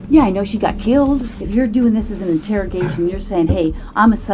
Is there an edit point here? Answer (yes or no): yes